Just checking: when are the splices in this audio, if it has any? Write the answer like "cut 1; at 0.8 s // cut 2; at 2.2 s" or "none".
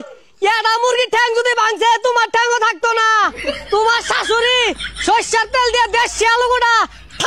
none